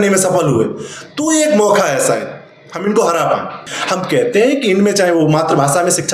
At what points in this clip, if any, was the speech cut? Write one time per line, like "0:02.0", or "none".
0:03.7